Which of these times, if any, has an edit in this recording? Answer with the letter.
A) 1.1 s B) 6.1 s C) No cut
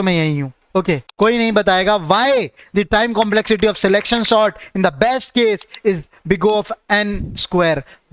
A